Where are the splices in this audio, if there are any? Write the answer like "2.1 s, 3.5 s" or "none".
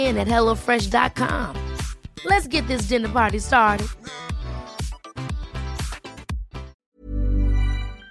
6.8 s